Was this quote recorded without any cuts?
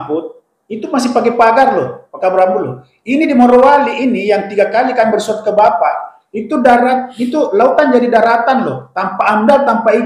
yes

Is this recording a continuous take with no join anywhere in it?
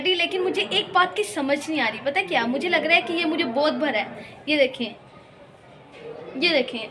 yes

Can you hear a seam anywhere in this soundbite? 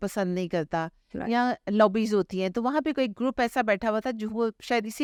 no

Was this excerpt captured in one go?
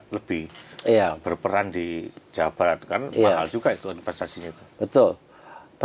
yes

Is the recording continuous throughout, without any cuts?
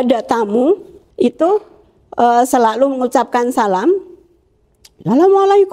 no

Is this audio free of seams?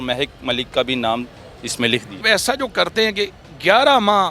no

